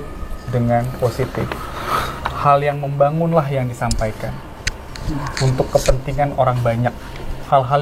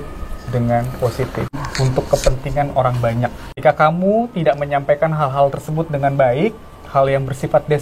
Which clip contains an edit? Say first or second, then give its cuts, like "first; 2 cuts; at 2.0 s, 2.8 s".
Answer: second; 2 cuts; at 1.6 s, 3.5 s